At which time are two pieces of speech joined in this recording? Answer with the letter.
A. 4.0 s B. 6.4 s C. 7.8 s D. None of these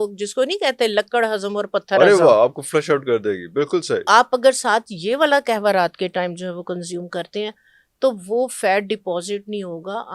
A